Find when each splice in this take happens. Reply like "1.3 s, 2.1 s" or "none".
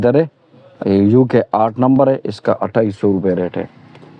none